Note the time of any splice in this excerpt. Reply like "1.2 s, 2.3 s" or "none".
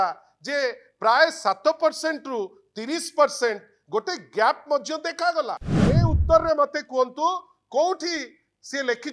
5.7 s